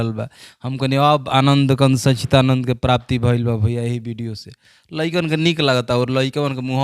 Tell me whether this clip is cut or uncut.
uncut